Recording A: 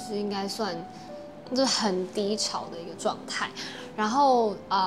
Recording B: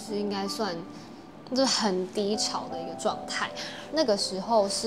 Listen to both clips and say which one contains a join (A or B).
B